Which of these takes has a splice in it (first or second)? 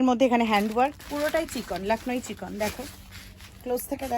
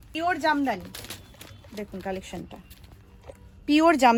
first